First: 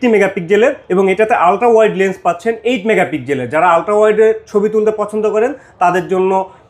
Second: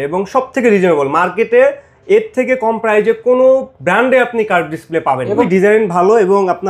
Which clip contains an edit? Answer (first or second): second